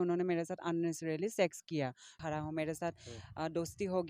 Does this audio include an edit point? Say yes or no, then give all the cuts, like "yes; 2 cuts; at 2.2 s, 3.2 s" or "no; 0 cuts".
yes; 1 cut; at 2.2 s